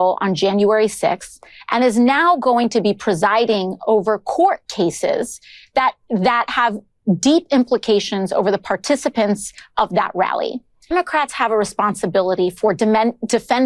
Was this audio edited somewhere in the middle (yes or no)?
yes